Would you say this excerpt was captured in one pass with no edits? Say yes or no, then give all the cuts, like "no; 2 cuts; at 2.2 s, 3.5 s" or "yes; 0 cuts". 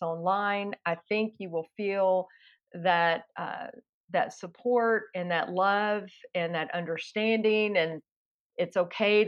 yes; 0 cuts